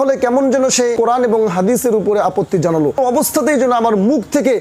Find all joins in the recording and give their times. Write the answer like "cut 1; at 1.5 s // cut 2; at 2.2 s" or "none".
cut 1; at 3.0 s